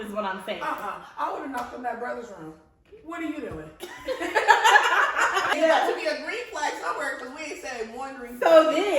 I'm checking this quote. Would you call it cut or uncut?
cut